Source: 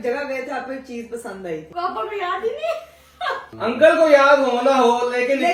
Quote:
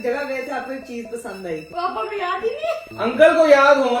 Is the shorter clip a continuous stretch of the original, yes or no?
no